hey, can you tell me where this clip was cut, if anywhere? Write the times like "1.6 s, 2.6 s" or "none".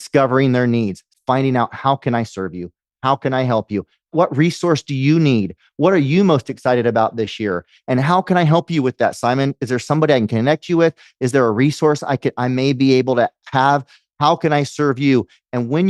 1.0 s, 4.1 s